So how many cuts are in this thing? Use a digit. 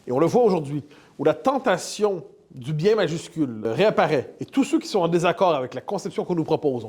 1